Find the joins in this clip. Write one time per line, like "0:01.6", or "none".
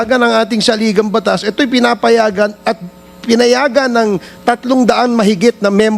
none